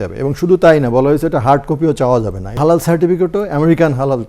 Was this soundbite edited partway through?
yes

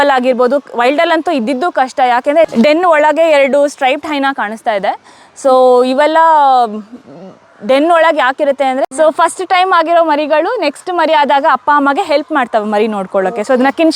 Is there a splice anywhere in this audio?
yes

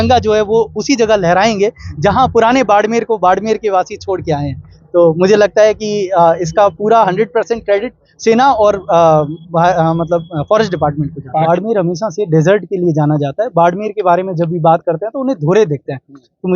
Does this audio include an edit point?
yes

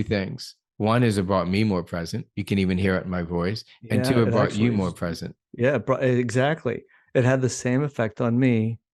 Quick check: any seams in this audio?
no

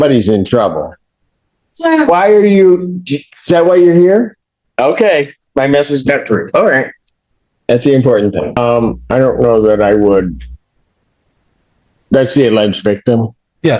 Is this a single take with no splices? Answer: no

